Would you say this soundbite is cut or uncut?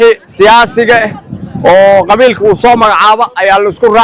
uncut